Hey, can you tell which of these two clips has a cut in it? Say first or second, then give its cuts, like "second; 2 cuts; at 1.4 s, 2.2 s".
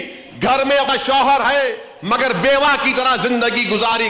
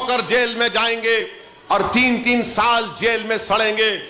first; 1 cut; at 0.9 s